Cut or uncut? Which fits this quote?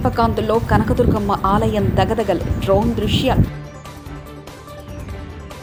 uncut